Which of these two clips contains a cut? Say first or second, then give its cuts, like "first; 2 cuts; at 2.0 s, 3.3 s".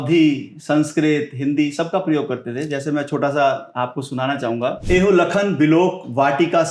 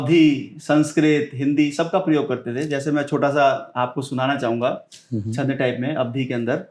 first; 1 cut; at 4.8 s